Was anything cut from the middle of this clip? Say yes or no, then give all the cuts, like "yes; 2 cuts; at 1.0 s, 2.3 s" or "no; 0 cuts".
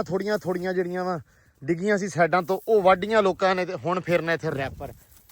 no; 0 cuts